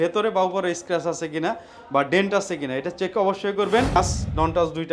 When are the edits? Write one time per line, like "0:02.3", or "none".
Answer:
0:04.0